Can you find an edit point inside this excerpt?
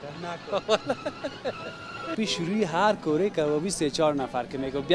yes; 1 cut; at 2.1 s

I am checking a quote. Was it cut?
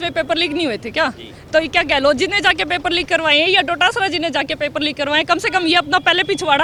no; 0 cuts

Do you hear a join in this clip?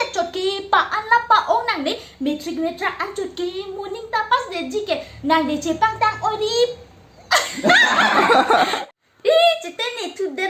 yes; 1 cut; at 8.7 s

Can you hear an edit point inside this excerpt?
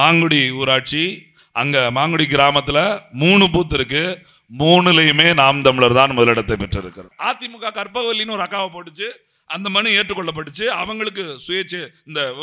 yes; 1 cut; at 7.1 s

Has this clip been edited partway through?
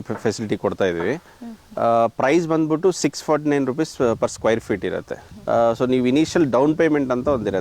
no; 0 cuts

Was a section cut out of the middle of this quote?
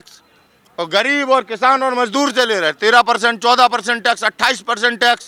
no; 0 cuts

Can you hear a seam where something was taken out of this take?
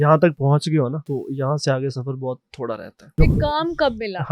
yes; 2 cuts; at 1.0 s, 3.1 s

